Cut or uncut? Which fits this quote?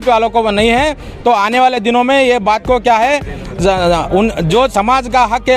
uncut